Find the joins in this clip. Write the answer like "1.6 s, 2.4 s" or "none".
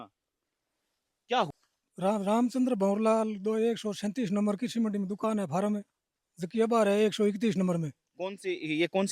1.5 s